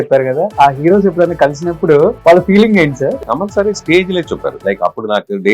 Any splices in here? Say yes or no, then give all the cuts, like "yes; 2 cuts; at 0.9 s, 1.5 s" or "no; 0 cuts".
yes; 3 cuts; at 2.2 s, 3.2 s, 4.6 s